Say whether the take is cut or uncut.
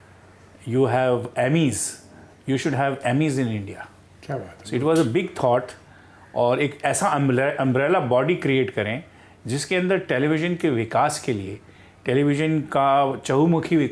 uncut